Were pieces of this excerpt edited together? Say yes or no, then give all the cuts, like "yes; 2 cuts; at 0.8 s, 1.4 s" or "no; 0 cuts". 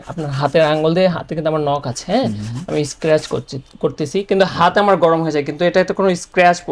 no; 0 cuts